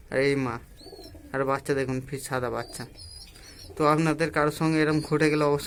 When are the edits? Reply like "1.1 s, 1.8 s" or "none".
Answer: none